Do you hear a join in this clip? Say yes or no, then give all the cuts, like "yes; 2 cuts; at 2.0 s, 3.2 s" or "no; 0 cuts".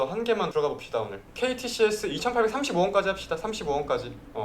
yes; 1 cut; at 1.2 s